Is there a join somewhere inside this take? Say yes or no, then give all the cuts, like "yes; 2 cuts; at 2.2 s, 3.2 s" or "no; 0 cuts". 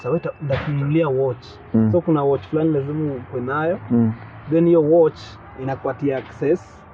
no; 0 cuts